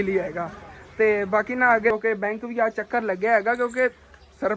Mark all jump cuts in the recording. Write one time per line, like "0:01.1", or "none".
0:01.9